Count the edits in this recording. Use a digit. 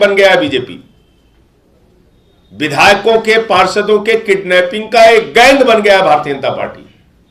0